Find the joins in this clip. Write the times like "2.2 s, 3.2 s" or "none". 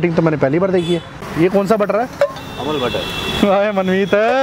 1.2 s